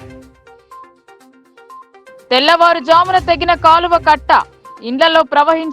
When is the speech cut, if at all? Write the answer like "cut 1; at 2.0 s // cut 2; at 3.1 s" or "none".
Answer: cut 1; at 1.9 s